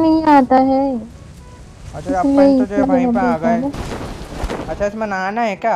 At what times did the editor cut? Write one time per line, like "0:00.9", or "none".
0:04.7